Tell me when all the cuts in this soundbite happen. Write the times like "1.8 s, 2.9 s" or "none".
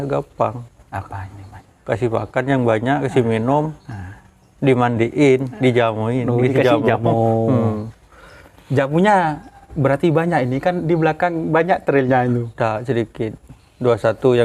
none